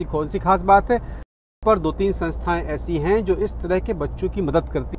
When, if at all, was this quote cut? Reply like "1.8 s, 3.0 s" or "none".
1.2 s